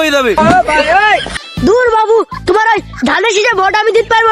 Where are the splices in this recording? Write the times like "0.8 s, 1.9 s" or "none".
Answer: 1.4 s